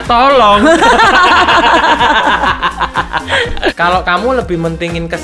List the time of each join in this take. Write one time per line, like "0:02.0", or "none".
0:03.7